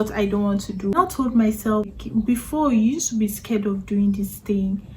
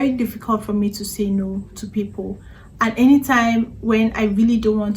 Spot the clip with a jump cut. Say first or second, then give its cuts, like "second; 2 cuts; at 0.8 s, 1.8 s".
first; 2 cuts; at 0.9 s, 1.9 s